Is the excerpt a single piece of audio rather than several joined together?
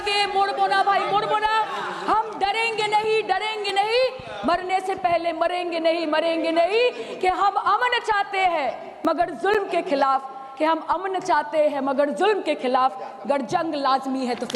yes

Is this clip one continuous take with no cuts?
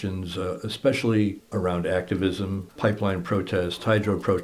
no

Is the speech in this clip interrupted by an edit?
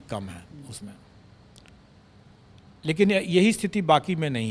no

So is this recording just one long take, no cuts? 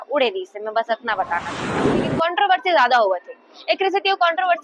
no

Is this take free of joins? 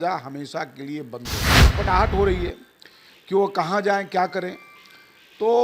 no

